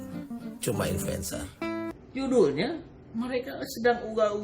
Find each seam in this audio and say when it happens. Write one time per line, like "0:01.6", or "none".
0:01.9